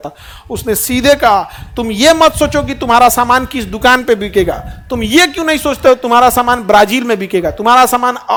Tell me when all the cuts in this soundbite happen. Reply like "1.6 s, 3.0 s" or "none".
none